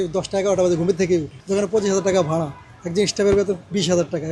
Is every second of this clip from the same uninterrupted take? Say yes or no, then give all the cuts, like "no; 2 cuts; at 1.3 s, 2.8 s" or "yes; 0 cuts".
no; 1 cut; at 1.4 s